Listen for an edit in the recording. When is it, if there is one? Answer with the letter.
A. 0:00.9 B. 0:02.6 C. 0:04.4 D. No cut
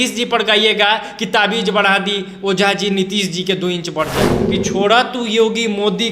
C